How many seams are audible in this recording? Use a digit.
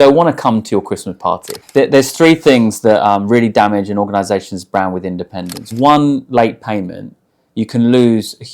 2